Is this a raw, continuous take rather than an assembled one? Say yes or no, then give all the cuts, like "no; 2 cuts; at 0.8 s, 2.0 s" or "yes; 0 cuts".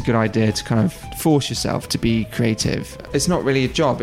no; 2 cuts; at 1.1 s, 2.9 s